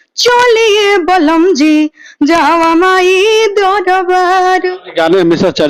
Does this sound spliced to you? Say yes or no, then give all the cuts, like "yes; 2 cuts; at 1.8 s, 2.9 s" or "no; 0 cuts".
yes; 1 cut; at 4.8 s